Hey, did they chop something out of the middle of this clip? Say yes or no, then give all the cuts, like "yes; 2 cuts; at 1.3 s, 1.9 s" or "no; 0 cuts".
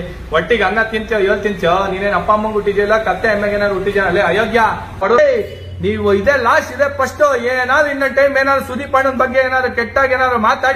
yes; 1 cut; at 5.0 s